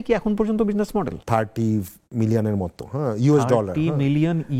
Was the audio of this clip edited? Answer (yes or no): yes